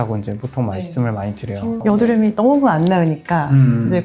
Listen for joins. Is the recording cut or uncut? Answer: uncut